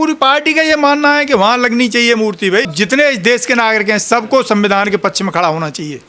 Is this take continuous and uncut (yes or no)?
no